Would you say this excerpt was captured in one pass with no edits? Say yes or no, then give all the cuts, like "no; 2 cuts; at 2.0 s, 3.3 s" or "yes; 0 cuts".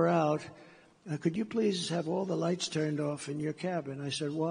yes; 0 cuts